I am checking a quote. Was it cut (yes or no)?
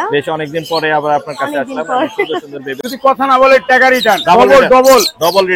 yes